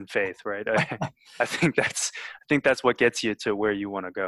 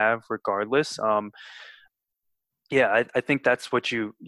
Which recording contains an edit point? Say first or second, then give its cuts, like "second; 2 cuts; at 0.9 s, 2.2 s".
second; 1 cut; at 1.9 s